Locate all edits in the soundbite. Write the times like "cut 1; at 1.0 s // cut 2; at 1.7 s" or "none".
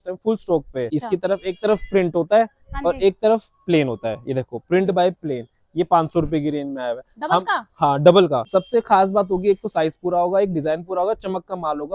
cut 1; at 0.9 s // cut 2; at 8.4 s